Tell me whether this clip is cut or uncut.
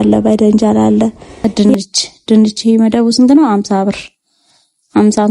cut